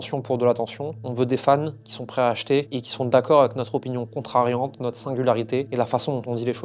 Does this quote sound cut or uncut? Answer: cut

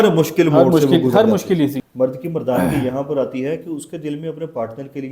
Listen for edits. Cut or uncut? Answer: cut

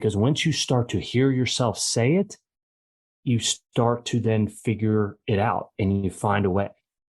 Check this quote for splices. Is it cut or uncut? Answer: uncut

